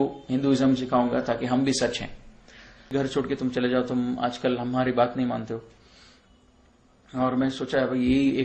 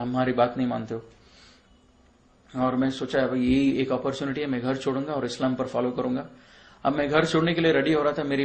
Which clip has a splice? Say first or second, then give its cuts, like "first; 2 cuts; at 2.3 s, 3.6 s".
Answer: first; 1 cut; at 2.9 s